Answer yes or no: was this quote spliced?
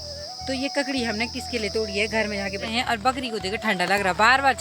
yes